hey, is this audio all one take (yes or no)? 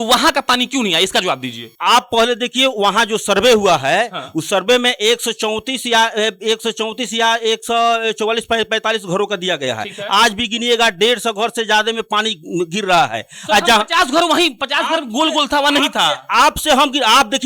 yes